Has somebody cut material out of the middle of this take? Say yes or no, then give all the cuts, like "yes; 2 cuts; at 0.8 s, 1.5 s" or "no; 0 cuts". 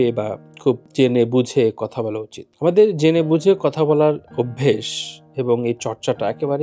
no; 0 cuts